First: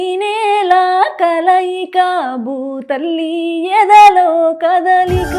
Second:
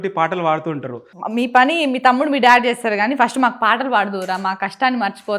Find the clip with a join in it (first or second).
second